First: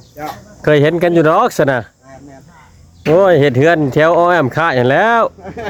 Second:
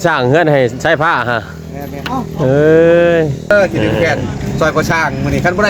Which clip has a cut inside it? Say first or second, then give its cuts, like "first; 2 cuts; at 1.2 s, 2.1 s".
second; 1 cut; at 3.5 s